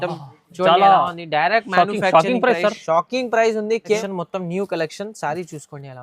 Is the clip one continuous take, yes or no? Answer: no